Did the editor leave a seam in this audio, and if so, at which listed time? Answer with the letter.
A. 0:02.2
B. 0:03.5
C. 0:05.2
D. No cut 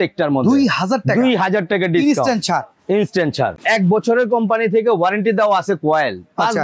B